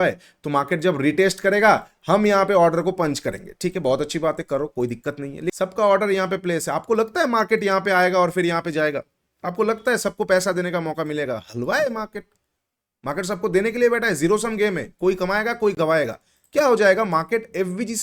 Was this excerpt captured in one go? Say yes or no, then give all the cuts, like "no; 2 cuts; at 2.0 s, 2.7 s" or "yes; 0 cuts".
no; 1 cut; at 5.5 s